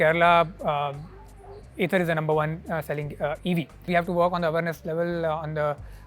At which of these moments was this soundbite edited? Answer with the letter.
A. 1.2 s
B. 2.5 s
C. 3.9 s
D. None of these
C